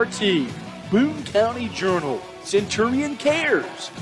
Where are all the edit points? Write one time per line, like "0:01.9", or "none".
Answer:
none